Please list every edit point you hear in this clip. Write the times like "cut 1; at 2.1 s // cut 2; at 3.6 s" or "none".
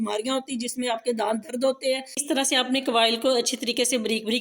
cut 1; at 2.2 s

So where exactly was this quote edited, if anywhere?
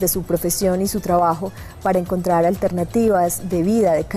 cut 1; at 1.3 s

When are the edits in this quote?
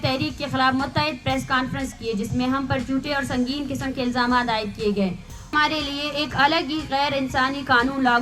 cut 1; at 5.5 s

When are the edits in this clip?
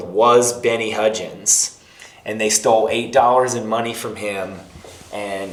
none

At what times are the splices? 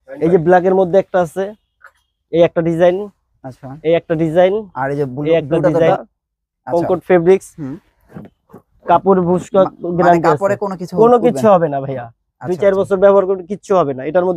cut 1; at 6.0 s

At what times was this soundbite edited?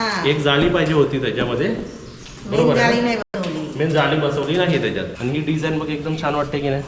cut 1; at 5.1 s

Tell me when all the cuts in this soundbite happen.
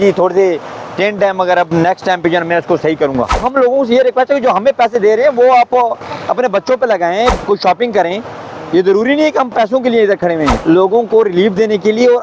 cut 1; at 3.4 s // cut 2; at 7.4 s // cut 3; at 10.6 s

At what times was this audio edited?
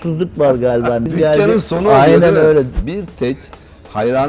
cut 1; at 1.1 s // cut 2; at 2.8 s

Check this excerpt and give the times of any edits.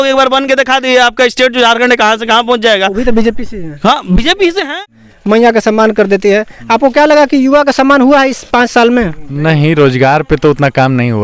cut 1; at 4.7 s

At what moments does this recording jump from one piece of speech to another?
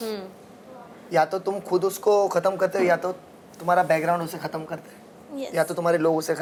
none

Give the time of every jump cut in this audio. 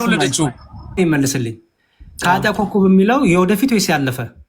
cut 1; at 1.0 s

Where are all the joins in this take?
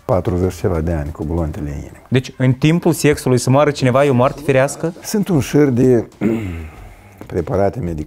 cut 1; at 2.0 s // cut 2; at 4.7 s

